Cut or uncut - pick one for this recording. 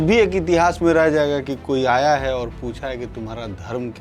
uncut